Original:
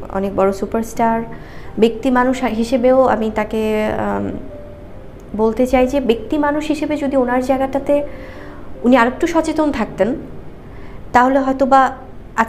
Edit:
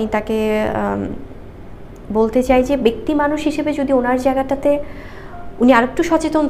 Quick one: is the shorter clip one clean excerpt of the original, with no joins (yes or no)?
yes